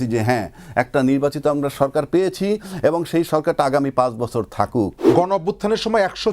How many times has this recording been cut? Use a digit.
1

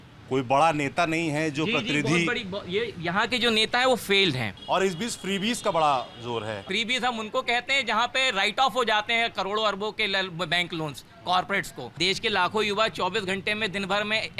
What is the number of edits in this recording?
3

